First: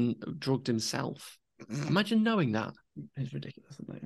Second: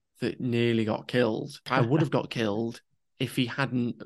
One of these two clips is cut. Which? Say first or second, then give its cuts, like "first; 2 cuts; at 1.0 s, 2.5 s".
second; 1 cut; at 1.6 s